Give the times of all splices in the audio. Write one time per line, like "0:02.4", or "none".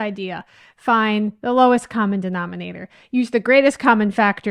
none

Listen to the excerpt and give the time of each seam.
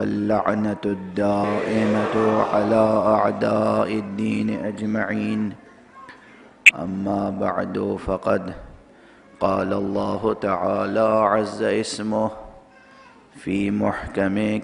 0:07.5

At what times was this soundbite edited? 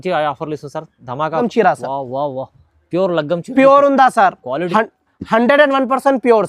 0:01.4

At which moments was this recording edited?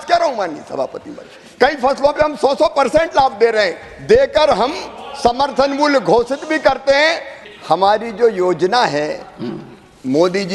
0:07.3

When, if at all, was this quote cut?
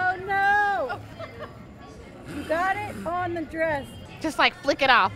0:01.1

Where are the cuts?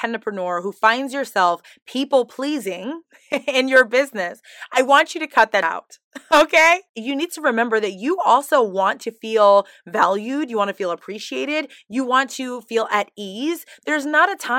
0:06.9

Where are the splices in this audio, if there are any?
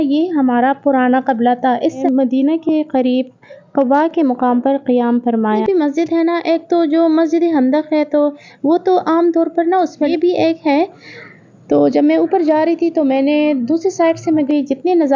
0:02.0
0:05.6
0:10.1
0:14.5

